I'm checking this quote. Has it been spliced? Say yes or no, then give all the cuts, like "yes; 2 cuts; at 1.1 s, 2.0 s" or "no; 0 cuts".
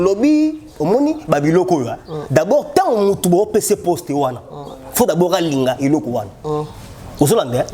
no; 0 cuts